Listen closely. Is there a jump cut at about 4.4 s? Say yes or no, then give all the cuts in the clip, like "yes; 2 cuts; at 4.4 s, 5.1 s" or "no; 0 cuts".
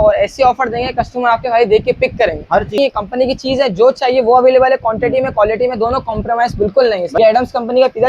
no; 2 cuts; at 2.8 s, 7.2 s